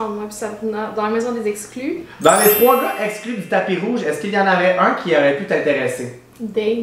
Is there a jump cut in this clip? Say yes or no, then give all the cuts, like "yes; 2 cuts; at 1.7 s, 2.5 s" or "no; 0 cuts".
yes; 1 cut; at 2.1 s